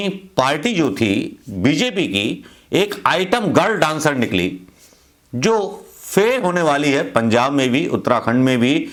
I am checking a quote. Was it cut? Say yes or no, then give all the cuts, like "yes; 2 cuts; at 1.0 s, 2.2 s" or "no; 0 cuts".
no; 0 cuts